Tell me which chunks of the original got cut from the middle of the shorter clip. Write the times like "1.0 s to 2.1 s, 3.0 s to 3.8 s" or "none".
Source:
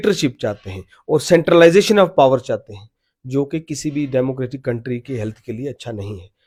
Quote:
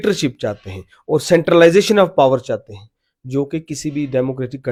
none